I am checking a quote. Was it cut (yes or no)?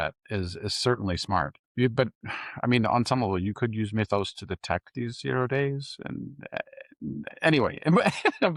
no